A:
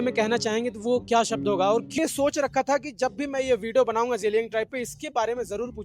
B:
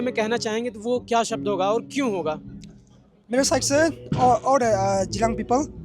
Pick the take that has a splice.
A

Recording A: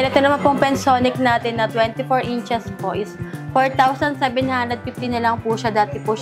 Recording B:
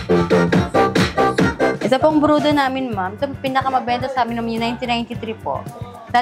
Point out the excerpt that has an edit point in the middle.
B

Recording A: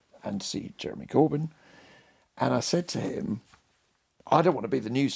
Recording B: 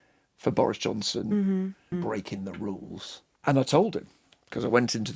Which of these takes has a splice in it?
B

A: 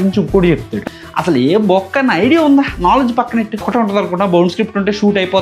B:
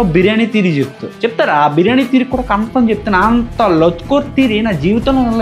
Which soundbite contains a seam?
A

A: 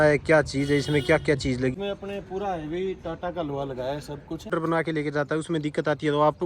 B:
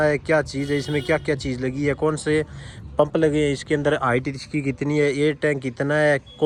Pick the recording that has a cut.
A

